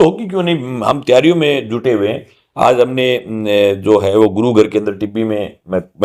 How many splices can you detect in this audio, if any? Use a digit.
0